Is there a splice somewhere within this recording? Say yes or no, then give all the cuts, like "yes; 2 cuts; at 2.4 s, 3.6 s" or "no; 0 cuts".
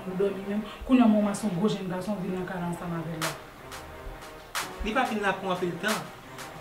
yes; 1 cut; at 4.6 s